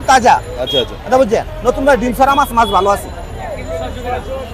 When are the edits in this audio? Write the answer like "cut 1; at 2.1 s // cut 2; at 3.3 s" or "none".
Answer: none